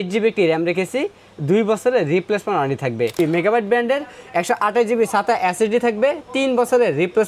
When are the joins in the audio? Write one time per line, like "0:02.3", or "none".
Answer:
0:03.1

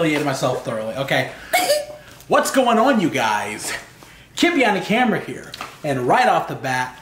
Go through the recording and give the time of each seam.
none

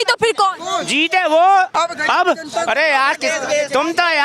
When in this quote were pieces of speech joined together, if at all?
0:01.7

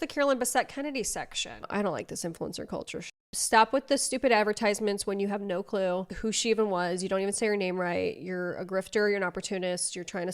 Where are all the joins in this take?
0:01.6
0:03.3

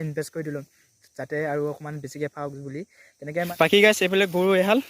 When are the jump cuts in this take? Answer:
0:03.5

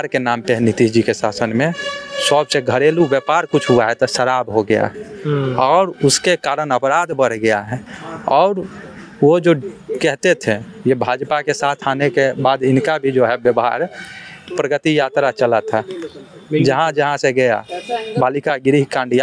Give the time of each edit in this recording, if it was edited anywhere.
none

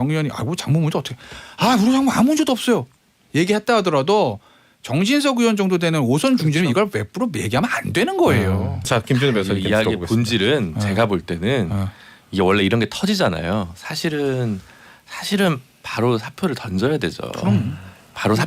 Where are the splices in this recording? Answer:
0:08.9

